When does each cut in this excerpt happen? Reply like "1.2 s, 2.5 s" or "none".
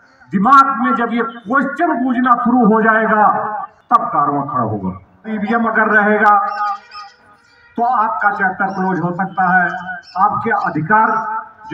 3.7 s, 5.3 s